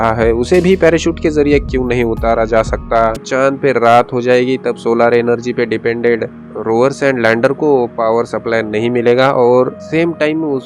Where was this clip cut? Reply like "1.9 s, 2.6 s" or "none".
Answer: 3.2 s